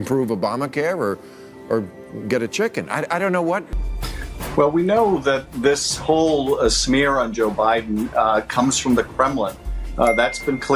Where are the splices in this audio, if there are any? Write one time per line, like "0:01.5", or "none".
0:03.7